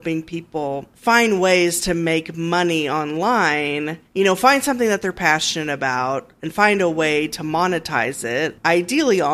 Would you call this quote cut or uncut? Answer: uncut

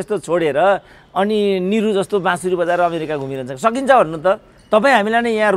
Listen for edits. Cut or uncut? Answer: uncut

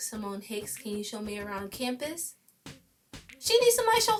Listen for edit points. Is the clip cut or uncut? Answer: uncut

